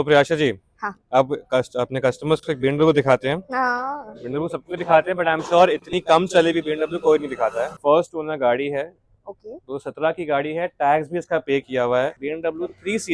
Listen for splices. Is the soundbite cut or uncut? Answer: cut